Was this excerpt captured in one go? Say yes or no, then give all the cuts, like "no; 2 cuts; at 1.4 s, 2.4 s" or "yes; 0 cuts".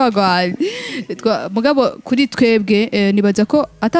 yes; 0 cuts